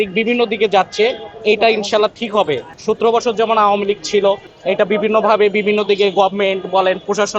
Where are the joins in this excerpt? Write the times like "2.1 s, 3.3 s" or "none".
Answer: none